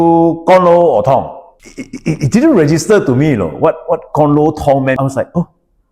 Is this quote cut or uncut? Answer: cut